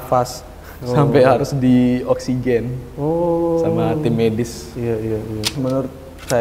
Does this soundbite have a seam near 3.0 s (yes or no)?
no